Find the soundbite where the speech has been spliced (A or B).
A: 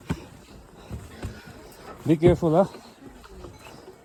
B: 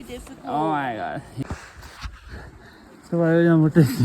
B